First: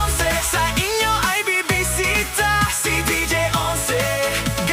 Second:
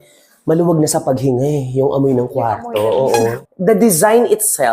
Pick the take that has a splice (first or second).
second